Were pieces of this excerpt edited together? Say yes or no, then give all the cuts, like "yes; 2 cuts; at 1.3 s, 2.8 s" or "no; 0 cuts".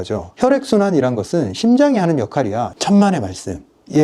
yes; 1 cut; at 2.7 s